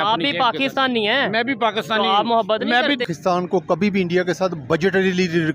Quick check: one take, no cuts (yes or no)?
no